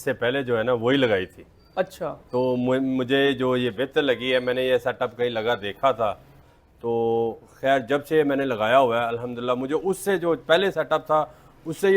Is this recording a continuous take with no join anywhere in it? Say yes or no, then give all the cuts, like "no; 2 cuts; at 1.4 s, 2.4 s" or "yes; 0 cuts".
no; 1 cut; at 6.5 s